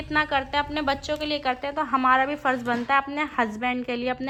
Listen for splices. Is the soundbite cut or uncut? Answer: uncut